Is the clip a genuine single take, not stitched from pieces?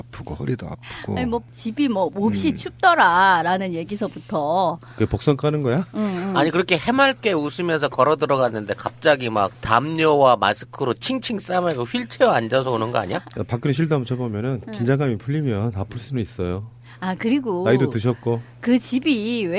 yes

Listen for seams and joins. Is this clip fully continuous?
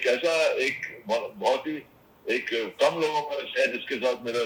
yes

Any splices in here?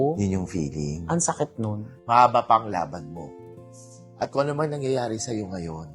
yes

